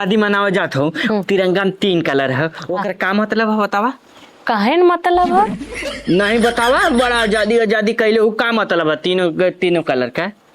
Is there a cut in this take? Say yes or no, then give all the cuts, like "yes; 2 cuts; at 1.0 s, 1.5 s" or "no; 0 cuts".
no; 0 cuts